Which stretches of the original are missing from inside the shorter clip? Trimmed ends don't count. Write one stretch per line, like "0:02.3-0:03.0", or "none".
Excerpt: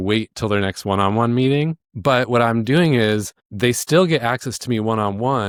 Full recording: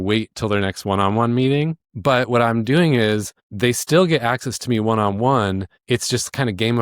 none